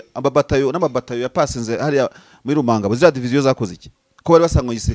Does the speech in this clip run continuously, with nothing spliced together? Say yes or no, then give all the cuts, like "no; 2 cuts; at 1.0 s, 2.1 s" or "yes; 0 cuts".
yes; 0 cuts